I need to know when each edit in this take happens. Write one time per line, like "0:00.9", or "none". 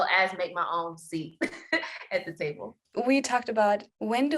none